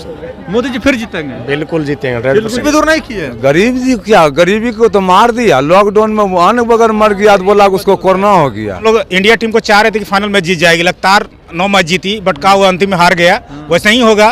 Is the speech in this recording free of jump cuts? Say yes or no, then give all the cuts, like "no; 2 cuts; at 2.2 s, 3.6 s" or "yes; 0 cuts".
no; 2 cuts; at 2.6 s, 8.8 s